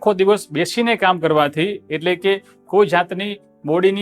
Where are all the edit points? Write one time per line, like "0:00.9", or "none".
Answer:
none

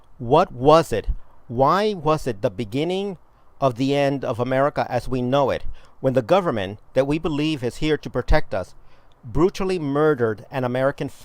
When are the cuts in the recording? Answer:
0:06.9

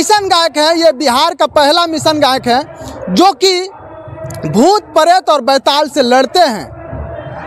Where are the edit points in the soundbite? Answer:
none

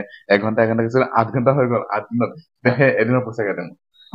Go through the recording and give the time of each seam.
none

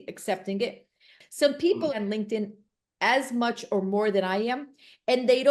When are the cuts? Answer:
0:01.1

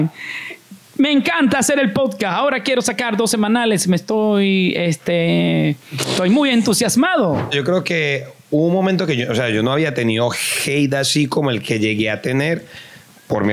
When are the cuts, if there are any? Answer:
0:07.5

